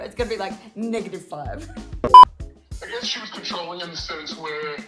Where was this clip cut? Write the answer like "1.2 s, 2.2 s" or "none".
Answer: 1.9 s, 2.5 s

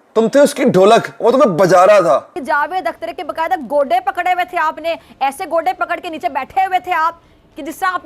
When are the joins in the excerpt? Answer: 2.4 s

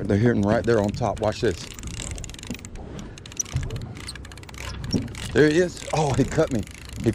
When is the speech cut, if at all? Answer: 3.8 s

